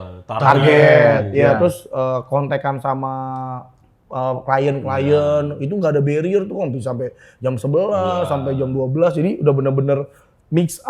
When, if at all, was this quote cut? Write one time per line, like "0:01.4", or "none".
none